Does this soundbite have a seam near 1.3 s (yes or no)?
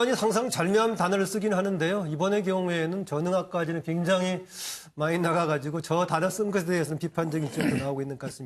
yes